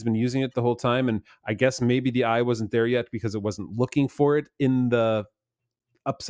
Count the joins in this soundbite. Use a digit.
0